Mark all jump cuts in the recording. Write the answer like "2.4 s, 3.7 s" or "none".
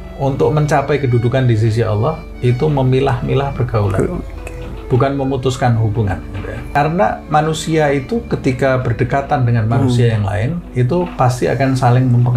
6.6 s